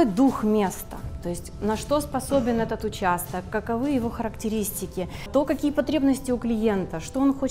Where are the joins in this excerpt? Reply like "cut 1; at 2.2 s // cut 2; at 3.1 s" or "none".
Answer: cut 1; at 5.3 s